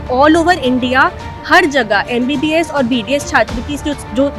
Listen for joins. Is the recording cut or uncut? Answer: uncut